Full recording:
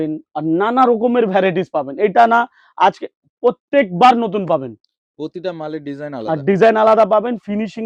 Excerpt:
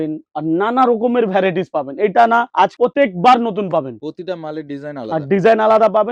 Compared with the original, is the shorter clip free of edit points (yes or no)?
no